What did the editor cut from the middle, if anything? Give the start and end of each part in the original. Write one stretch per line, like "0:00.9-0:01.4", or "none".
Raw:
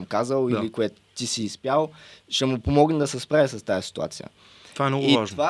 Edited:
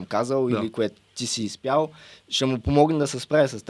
none